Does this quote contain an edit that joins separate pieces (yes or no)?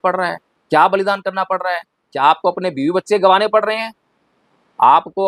no